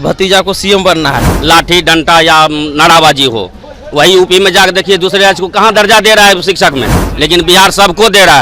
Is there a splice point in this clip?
yes; 2 cuts; at 1.3 s, 7.0 s

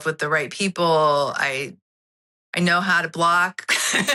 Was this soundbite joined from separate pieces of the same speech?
no; 0 cuts

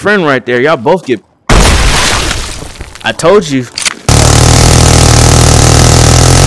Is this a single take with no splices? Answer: no; 2 cuts; at 2.7 s, 4.2 s

